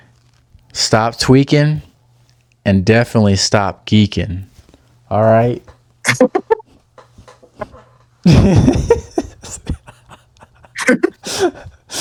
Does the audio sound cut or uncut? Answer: uncut